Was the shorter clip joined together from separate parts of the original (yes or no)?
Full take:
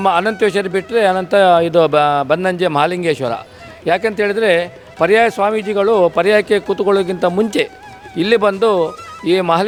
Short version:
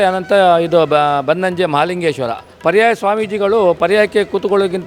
yes